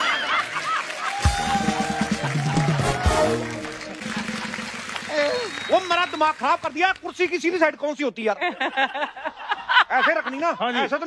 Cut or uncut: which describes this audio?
cut